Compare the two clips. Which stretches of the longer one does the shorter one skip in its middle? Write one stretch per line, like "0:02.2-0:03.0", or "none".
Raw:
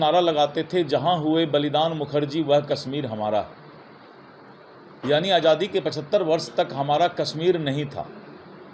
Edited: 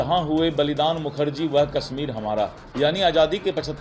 0:03.6-0:04.9